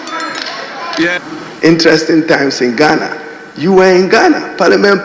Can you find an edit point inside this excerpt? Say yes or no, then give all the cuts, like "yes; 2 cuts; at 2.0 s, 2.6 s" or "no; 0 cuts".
yes; 1 cut; at 1.2 s